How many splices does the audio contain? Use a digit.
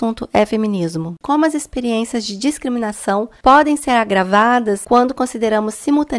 1